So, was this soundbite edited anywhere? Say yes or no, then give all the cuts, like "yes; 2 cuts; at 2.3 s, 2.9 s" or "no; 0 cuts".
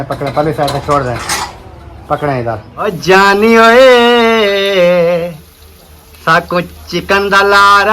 yes; 1 cut; at 2.9 s